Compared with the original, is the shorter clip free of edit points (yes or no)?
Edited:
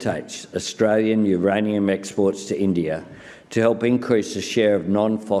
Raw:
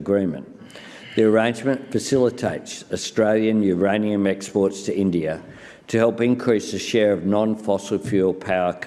yes